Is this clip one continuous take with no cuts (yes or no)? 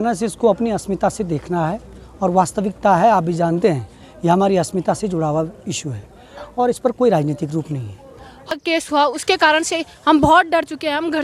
no